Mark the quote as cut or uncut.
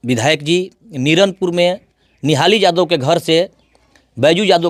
uncut